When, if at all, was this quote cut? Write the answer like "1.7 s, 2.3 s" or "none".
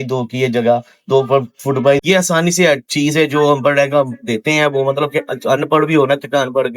2.0 s